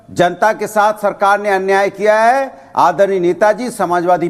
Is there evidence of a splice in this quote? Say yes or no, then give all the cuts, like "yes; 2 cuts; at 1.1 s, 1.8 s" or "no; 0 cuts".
no; 0 cuts